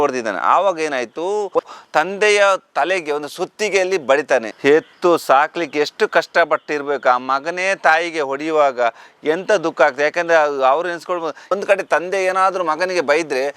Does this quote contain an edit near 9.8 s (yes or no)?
no